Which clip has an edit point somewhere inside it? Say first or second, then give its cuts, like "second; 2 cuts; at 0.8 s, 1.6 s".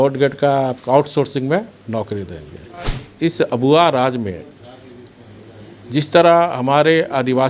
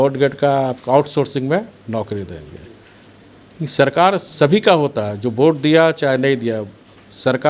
first; 1 cut; at 3.0 s